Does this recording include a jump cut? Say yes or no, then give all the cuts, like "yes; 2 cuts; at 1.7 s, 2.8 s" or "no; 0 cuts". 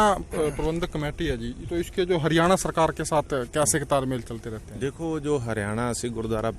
no; 0 cuts